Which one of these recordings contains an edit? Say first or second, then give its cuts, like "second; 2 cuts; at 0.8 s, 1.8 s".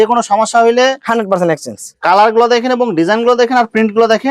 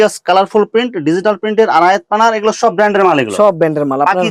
first; 1 cut; at 1.9 s